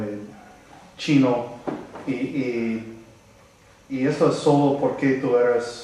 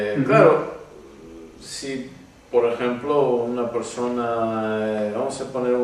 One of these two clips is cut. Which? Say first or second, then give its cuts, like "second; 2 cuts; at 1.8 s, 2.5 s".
first; 1 cut; at 1.6 s